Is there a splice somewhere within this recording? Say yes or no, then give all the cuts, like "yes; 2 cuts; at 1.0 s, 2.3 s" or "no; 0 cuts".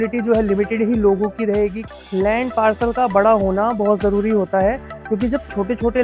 yes; 1 cut; at 1.8 s